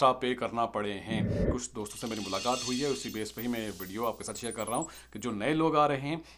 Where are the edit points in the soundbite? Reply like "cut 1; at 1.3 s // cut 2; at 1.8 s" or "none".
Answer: cut 1; at 1.5 s